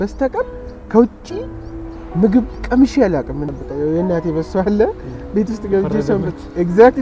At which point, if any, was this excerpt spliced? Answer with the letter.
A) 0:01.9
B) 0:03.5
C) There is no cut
B